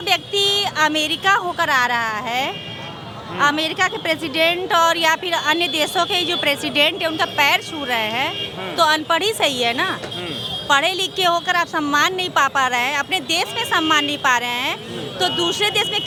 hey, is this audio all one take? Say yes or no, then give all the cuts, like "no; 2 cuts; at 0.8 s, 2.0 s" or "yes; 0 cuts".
yes; 0 cuts